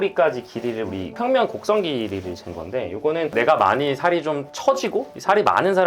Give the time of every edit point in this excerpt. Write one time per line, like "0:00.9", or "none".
none